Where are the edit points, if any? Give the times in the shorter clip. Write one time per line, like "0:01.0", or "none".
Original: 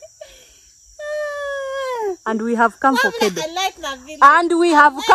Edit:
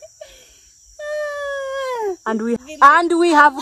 0:02.6